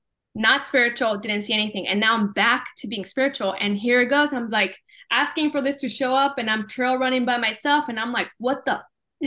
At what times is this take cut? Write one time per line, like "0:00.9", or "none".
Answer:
none